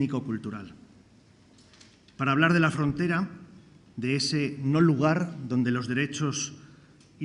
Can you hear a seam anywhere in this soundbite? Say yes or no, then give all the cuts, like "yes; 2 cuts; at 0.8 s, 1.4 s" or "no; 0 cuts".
yes; 1 cut; at 5.3 s